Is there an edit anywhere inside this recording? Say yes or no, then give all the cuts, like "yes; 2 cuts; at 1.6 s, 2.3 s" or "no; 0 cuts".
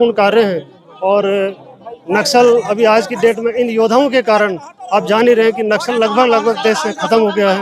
no; 0 cuts